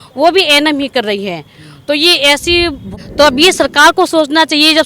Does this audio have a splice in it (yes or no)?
yes